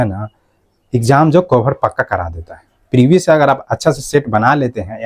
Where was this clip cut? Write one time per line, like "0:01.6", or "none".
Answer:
none